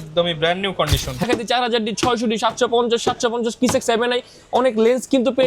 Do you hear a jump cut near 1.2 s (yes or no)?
yes